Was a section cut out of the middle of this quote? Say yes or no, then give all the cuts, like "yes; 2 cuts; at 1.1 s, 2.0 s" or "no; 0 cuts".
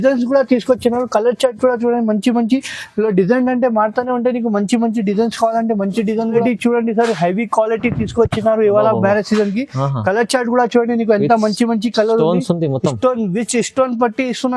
yes; 1 cut; at 6.4 s